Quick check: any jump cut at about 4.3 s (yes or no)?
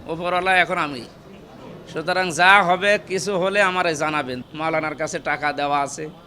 yes